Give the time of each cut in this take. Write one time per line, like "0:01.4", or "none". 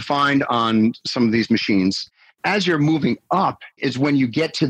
0:02.0
0:03.8